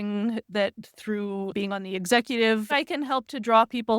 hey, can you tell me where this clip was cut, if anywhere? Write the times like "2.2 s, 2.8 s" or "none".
1.5 s, 2.7 s